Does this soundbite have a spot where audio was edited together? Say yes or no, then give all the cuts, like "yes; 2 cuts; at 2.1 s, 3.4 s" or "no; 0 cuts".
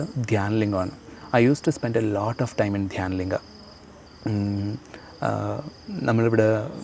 no; 0 cuts